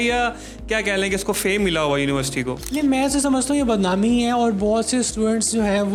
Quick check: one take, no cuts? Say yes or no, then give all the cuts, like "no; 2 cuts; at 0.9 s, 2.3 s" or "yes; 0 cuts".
yes; 0 cuts